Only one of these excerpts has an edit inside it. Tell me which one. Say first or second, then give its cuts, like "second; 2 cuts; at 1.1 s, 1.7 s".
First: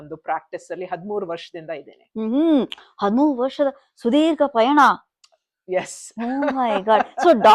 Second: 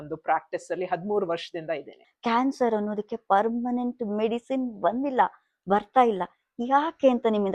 second; 1 cut; at 2.0 s